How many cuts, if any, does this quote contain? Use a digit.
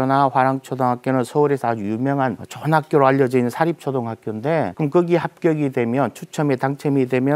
2